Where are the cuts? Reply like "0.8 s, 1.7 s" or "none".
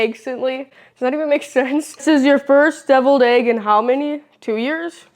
1.9 s